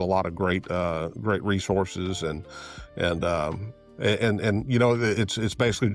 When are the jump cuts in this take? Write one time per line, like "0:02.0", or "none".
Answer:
none